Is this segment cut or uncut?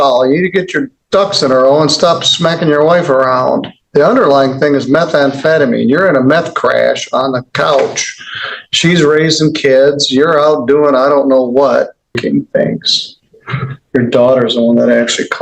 cut